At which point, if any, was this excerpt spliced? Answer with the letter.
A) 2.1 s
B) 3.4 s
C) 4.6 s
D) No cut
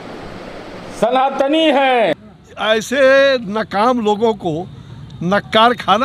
A